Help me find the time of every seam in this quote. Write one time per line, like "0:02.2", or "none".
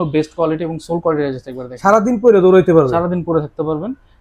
none